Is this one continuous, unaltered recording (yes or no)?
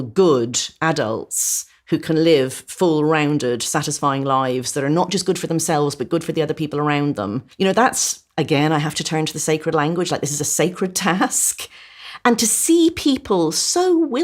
no